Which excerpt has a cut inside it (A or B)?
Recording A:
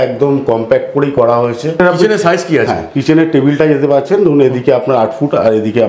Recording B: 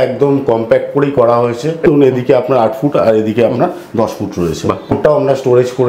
B